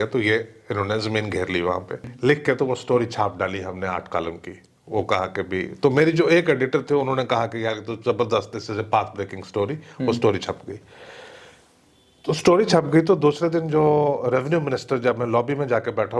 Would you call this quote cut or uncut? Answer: cut